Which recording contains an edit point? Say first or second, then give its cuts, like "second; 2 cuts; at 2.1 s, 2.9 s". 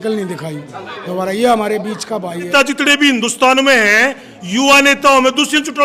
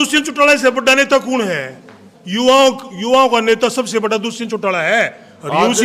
first; 1 cut; at 2.5 s